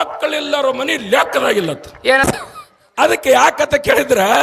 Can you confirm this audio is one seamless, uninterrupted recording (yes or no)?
no